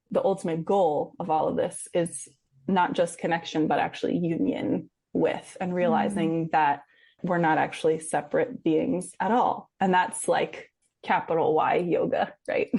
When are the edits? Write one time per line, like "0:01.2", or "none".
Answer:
none